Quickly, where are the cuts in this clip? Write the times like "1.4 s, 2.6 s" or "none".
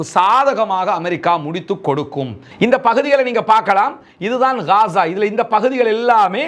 2.5 s